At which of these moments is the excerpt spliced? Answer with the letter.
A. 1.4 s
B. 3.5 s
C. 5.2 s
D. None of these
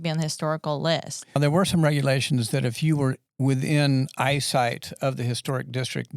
A